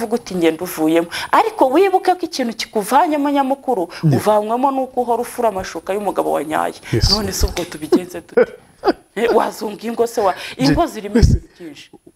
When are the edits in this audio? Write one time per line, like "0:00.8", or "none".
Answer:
none